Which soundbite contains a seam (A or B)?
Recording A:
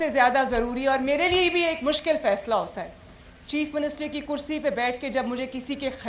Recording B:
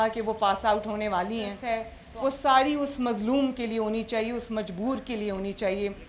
B